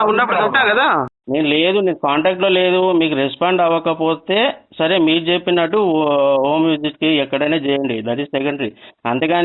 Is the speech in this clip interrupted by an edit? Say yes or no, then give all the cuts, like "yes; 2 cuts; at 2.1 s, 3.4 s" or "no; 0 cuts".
yes; 1 cut; at 1.2 s